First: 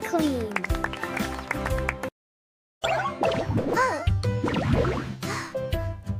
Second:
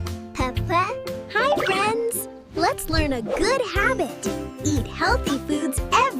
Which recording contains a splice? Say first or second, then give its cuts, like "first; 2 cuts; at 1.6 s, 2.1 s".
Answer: second; 1 cut; at 1.0 s